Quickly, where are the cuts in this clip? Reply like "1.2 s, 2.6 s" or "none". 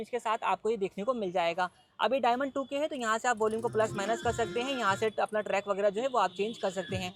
none